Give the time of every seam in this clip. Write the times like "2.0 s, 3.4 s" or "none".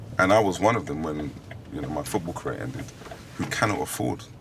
none